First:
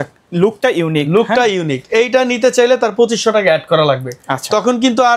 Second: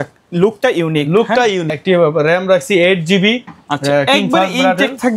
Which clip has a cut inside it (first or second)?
second